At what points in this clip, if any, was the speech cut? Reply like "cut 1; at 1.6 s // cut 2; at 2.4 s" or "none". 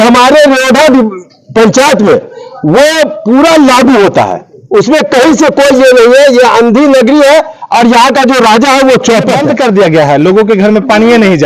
cut 1; at 9.4 s